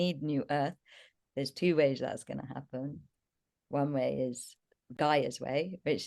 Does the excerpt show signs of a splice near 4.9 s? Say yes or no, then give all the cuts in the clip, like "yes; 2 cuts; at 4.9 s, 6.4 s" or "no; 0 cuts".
yes; 1 cut; at 4.9 s